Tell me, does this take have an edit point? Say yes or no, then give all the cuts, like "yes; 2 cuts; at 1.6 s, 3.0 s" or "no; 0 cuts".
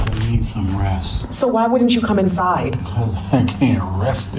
yes; 1 cut; at 1.2 s